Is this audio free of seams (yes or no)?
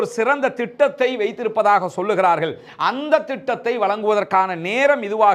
yes